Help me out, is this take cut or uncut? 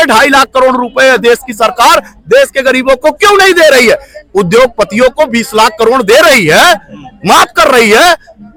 uncut